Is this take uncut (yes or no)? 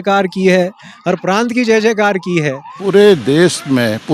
no